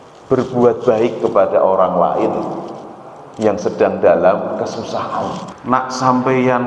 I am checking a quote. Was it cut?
yes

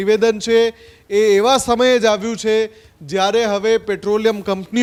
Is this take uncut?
yes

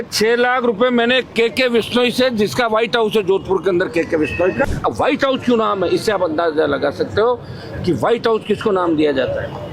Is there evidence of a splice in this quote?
yes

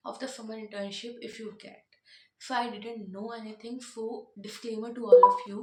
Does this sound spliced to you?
no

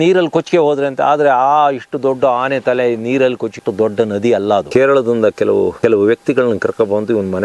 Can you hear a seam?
yes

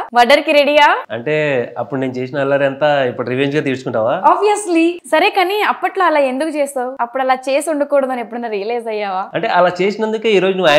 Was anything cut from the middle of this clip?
yes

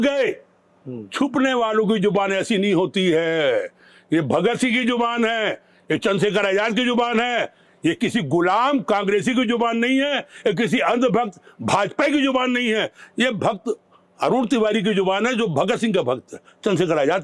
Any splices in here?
no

